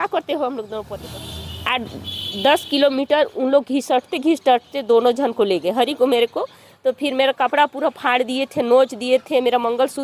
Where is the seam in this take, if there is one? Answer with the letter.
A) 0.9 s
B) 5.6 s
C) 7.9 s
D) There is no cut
A